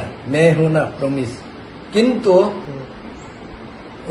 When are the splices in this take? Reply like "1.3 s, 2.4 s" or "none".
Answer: 2.6 s